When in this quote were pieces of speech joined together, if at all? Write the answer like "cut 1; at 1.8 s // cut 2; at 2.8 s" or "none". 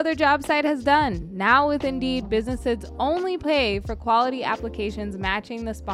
none